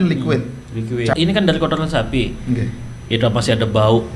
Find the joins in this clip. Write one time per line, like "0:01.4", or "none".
0:01.1